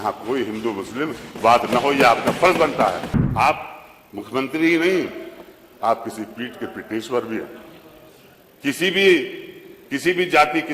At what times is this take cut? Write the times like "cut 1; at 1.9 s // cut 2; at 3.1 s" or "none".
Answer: cut 1; at 3.1 s